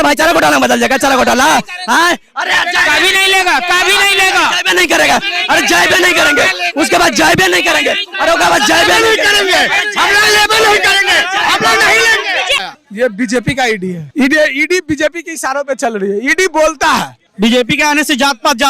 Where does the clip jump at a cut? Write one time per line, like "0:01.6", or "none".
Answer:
0:12.6
0:17.3